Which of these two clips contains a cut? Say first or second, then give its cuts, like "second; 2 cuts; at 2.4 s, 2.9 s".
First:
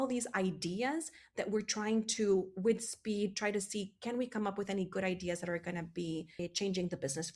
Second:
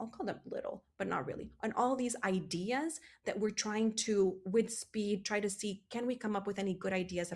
first; 1 cut; at 6.4 s